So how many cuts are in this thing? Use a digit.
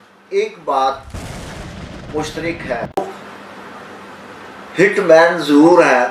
1